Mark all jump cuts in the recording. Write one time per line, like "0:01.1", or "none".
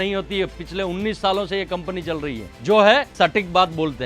0:02.5
0:03.1